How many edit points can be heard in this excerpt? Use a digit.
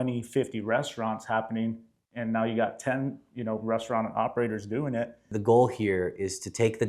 1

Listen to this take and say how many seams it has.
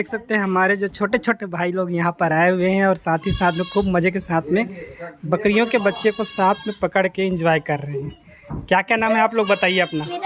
0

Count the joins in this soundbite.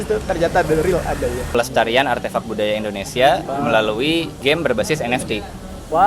2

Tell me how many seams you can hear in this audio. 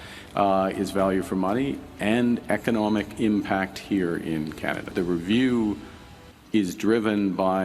1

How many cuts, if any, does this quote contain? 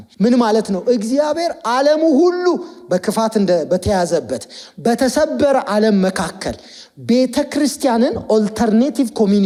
0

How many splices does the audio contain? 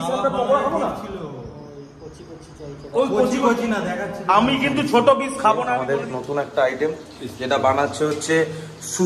1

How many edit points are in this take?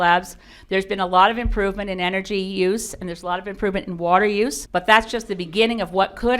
1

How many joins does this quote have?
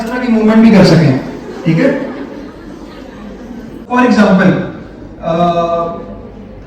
1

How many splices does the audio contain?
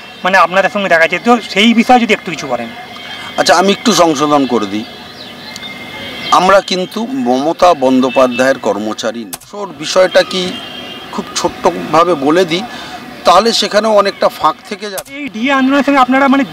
2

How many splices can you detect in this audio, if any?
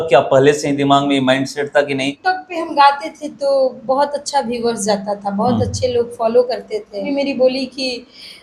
2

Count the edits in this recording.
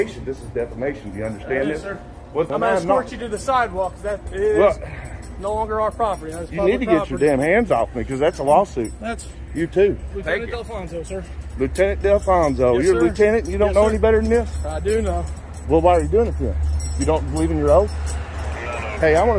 1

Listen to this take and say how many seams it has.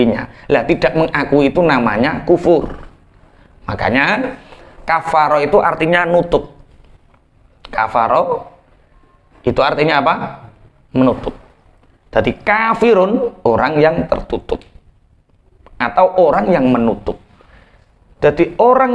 0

